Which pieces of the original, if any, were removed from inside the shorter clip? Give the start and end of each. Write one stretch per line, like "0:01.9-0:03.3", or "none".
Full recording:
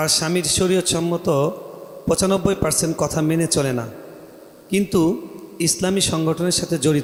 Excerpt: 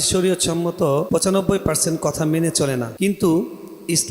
0:01.5-0:02.0
0:03.9-0:04.6